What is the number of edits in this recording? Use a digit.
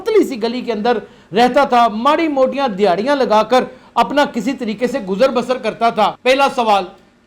1